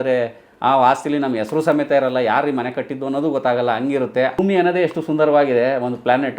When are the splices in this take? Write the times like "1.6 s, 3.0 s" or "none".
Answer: 4.4 s